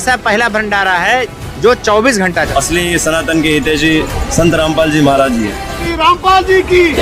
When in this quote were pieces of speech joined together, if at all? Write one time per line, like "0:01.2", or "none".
0:02.5
0:05.8